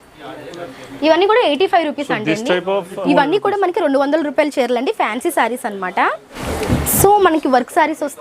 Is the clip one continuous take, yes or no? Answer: no